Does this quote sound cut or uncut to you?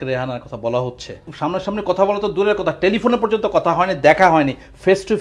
cut